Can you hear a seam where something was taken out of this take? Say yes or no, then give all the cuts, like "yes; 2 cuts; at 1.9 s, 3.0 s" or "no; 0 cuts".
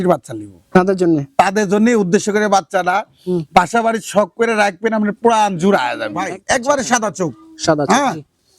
yes; 1 cut; at 6.3 s